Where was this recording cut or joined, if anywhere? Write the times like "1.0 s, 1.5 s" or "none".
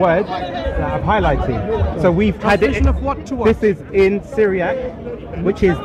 none

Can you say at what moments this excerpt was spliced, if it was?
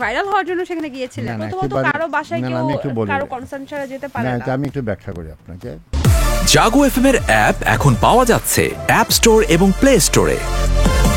5.9 s

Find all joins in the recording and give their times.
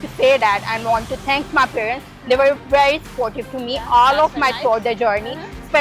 none

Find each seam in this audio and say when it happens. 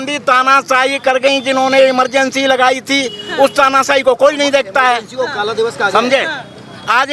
none

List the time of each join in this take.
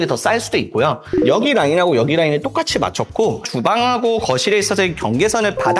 1.1 s

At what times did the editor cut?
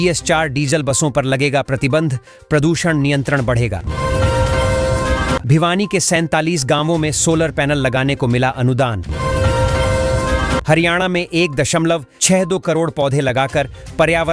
none

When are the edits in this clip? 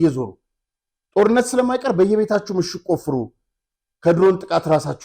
none

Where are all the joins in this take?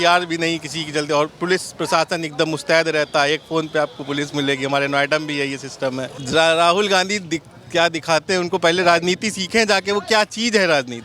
6.2 s

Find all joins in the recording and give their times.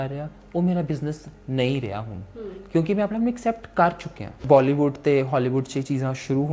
4.4 s

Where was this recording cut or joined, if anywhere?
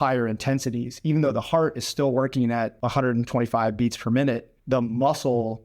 2.8 s, 4.5 s

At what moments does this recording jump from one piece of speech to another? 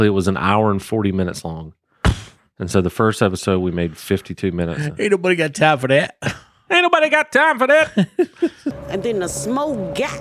8.8 s

